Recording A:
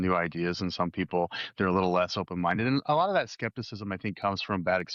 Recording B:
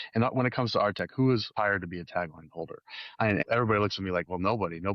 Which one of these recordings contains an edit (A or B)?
B